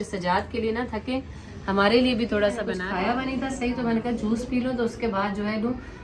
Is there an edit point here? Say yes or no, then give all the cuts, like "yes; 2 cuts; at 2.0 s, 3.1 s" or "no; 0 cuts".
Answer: yes; 1 cut; at 2.7 s